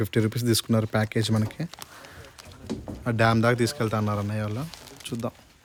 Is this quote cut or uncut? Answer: uncut